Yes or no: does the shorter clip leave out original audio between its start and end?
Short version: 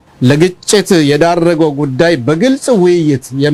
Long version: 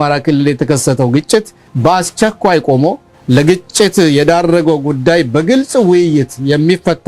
no